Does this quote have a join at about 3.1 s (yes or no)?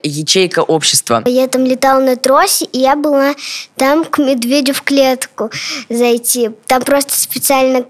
no